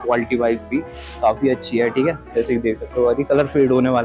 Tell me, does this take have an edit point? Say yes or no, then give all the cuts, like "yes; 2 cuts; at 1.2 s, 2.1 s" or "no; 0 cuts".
no; 0 cuts